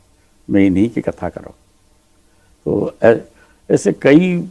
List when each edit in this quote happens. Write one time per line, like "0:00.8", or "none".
none

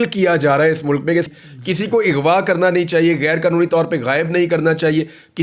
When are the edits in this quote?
0:01.3

